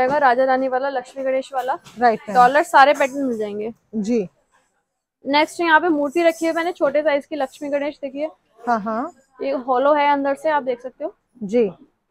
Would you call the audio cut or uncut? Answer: uncut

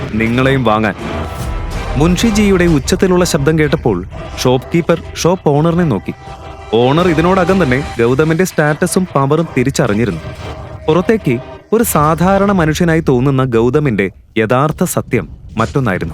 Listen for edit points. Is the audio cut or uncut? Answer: uncut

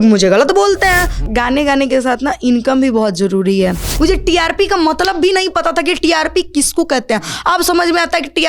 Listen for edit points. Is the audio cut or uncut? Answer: cut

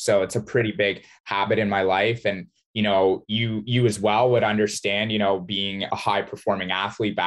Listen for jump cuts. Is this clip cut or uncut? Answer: uncut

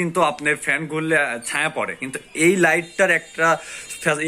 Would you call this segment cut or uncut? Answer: uncut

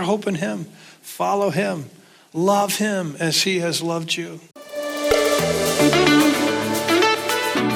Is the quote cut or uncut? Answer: cut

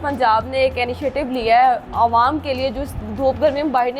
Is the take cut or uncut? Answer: uncut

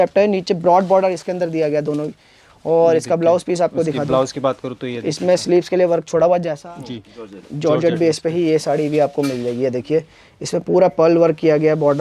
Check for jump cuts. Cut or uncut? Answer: cut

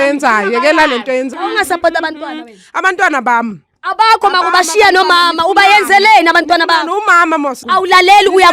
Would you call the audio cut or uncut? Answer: cut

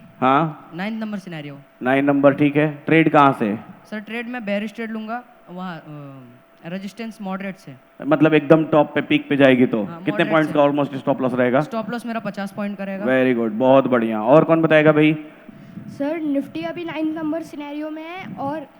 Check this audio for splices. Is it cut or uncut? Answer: cut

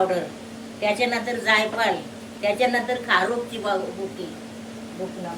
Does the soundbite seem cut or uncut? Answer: uncut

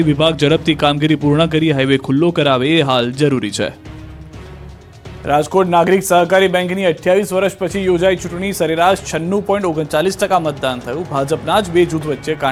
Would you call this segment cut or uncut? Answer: uncut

